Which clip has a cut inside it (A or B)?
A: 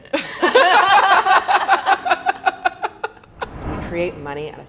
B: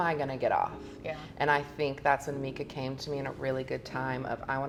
A